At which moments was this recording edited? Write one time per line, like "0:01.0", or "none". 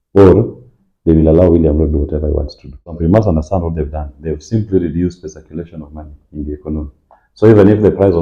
0:03.0